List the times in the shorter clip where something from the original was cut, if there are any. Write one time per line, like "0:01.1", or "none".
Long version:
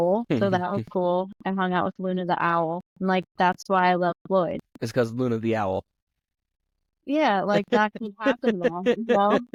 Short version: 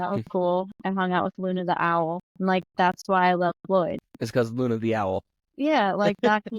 0:05.4